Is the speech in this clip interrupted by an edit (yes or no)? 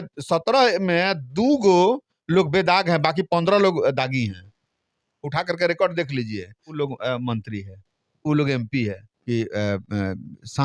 yes